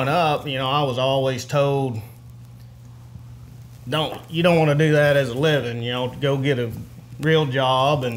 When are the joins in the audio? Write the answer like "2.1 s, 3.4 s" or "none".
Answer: none